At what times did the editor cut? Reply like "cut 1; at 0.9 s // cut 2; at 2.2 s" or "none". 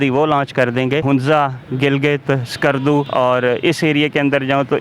cut 1; at 1.0 s // cut 2; at 3.1 s